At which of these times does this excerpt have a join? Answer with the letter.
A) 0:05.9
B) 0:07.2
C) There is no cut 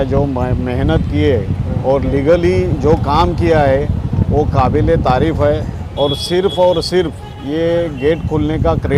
C